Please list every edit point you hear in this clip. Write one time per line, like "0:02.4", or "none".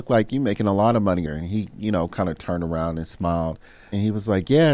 0:01.2
0:03.9